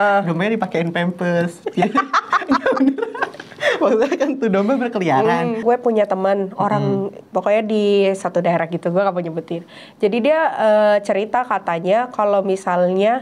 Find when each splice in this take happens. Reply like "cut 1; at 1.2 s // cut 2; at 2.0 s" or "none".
cut 1; at 5.6 s